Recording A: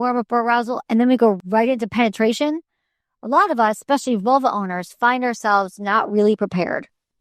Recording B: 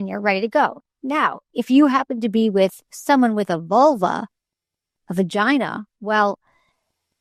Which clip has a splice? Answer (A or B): A